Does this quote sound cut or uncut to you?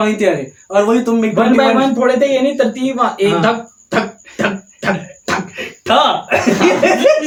uncut